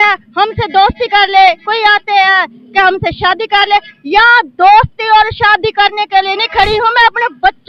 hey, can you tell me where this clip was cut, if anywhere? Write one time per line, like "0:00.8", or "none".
none

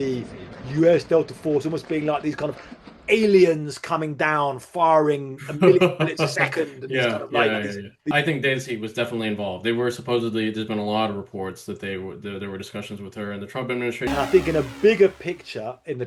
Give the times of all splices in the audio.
0:08.1
0:14.1

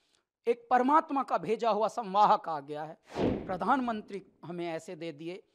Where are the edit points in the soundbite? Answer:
0:03.2

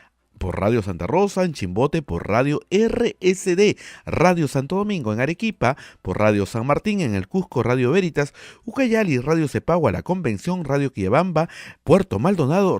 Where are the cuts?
none

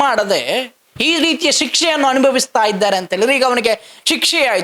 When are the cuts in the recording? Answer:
none

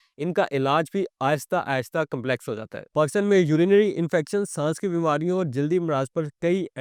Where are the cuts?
none

